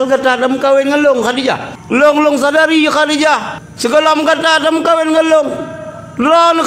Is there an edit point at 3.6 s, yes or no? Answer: yes